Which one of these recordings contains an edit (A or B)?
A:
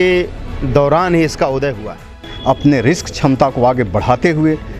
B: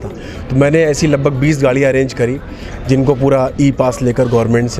A